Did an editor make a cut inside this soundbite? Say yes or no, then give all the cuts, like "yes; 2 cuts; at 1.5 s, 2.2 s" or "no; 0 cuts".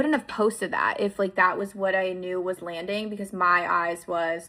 no; 0 cuts